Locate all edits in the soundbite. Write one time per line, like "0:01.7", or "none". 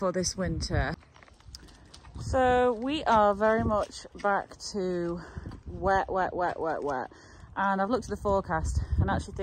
0:01.0